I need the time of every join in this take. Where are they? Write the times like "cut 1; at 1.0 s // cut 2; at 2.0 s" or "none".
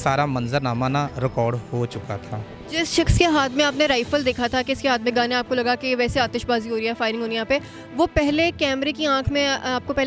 none